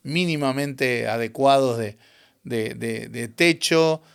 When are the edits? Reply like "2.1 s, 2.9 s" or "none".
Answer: none